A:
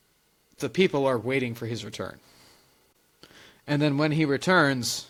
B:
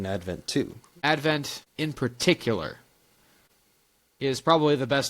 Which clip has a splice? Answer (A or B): B